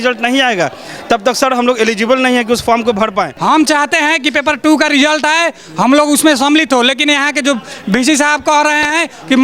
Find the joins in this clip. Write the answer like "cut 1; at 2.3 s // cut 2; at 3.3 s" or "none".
cut 1; at 3.3 s